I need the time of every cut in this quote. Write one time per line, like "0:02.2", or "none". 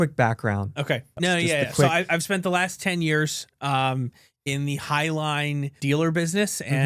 0:01.1
0:05.7

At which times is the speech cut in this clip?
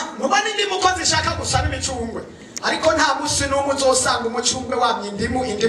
none

